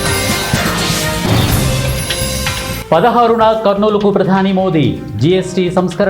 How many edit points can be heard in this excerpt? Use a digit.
1